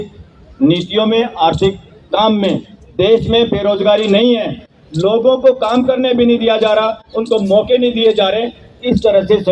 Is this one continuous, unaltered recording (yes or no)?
yes